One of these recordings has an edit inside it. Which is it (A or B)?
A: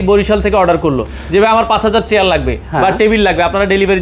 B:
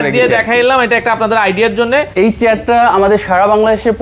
B